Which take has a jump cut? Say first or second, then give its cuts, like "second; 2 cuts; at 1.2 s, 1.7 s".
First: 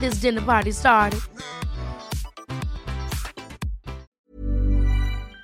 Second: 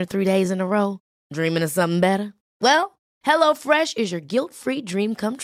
first; 1 cut; at 4.1 s